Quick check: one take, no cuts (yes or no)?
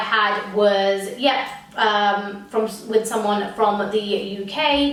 yes